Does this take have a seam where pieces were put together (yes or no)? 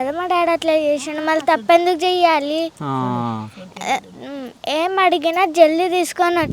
no